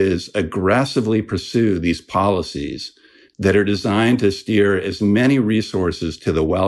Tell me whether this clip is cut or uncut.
uncut